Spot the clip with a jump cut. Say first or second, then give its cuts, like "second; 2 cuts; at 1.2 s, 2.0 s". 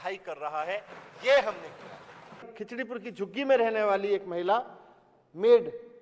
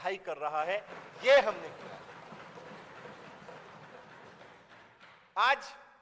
first; 1 cut; at 2.5 s